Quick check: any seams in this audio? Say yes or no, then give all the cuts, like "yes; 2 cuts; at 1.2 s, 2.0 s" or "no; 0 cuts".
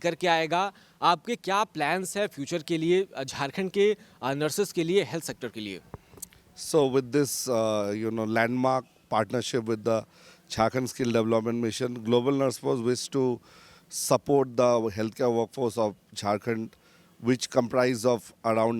no; 0 cuts